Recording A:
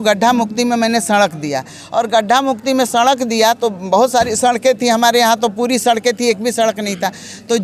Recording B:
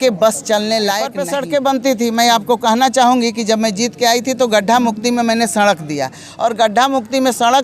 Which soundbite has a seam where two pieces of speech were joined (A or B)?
B